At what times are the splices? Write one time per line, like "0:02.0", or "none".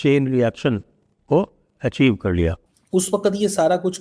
0:02.7